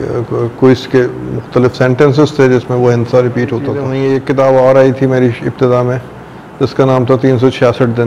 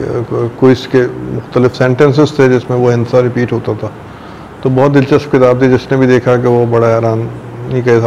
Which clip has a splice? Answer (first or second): first